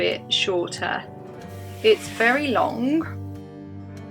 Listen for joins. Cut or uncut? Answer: uncut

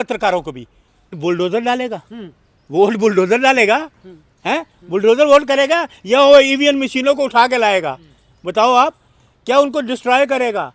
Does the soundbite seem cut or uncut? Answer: cut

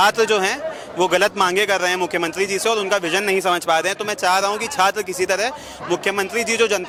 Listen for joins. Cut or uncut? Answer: uncut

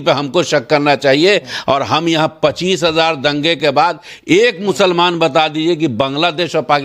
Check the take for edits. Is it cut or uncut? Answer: uncut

